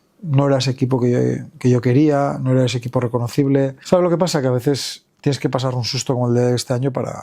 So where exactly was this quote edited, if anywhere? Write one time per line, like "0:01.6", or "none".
0:03.8